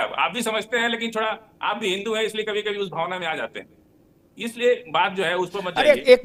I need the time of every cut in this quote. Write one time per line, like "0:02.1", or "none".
none